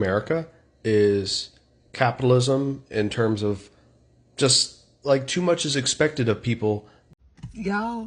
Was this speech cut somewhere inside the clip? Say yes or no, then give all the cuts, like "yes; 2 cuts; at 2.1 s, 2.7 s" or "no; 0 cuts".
yes; 1 cut; at 7.0 s